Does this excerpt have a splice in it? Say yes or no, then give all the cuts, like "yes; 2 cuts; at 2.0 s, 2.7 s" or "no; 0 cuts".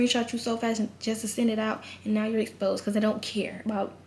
no; 0 cuts